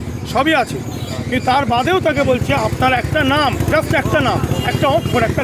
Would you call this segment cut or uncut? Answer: uncut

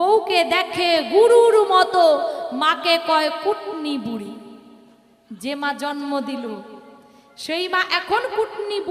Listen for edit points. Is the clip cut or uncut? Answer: uncut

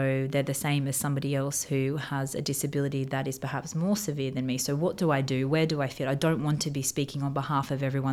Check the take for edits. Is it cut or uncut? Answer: uncut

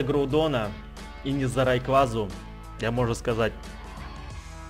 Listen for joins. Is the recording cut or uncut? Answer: uncut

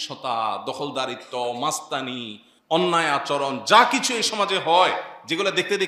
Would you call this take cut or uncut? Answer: uncut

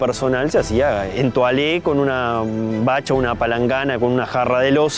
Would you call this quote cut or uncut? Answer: cut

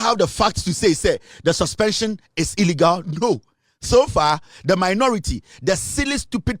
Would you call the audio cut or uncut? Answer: cut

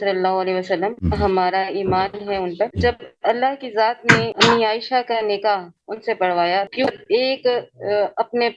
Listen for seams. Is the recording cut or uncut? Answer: uncut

